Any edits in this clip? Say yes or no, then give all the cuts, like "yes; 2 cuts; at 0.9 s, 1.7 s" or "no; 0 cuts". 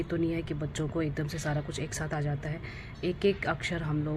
no; 0 cuts